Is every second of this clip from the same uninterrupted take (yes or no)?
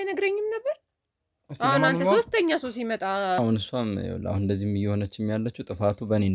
no